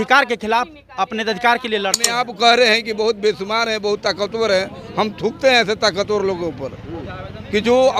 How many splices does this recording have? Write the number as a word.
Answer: one